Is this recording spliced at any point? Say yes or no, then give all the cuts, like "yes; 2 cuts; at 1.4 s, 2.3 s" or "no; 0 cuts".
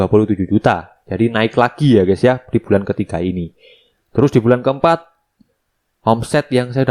no; 0 cuts